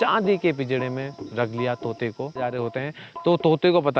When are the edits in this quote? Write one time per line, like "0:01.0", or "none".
0:02.4